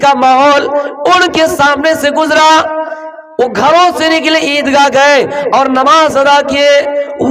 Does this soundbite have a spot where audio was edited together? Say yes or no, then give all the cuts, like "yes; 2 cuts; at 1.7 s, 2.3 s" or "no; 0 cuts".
no; 0 cuts